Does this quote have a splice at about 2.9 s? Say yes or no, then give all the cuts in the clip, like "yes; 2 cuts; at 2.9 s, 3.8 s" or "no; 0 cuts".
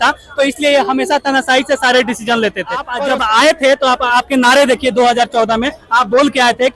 yes; 1 cut; at 2.9 s